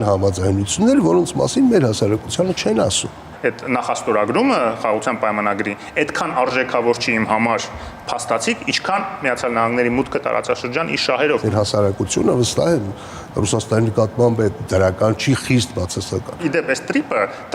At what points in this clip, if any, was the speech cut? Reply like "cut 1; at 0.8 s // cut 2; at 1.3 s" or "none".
cut 1; at 3.3 s // cut 2; at 11.4 s // cut 3; at 16.4 s